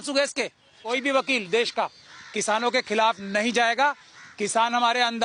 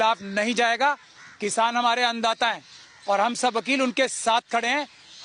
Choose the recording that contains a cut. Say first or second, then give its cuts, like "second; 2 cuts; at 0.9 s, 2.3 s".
first; 1 cut; at 0.9 s